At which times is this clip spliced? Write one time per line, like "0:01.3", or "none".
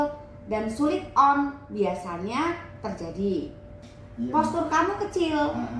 0:04.1